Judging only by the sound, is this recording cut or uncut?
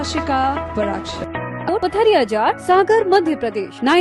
cut